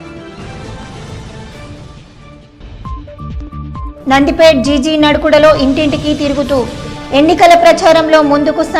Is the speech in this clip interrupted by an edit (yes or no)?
no